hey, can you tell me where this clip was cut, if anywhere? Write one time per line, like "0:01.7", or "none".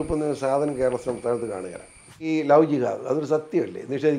0:02.2